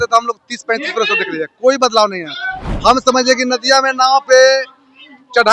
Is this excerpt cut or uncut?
uncut